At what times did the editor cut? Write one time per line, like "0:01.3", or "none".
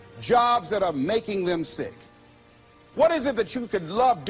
0:02.3